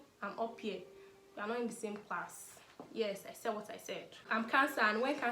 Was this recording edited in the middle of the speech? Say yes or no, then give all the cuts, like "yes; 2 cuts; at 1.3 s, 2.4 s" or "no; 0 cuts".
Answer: yes; 1 cut; at 4.3 s